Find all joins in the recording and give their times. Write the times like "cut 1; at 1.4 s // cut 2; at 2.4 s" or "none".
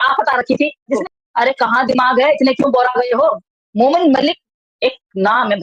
cut 1; at 1.0 s